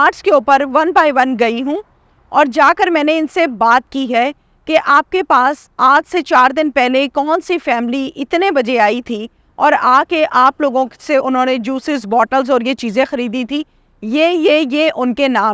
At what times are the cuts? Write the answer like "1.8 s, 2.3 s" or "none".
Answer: none